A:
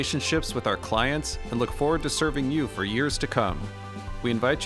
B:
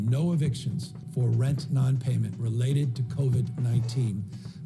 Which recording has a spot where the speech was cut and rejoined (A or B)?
B